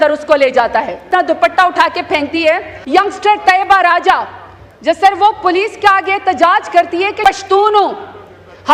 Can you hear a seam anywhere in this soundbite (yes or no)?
yes